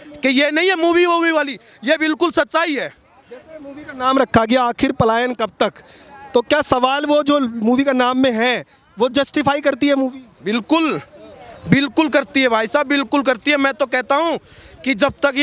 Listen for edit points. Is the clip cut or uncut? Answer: uncut